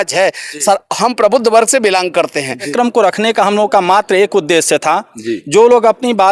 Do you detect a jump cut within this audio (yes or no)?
yes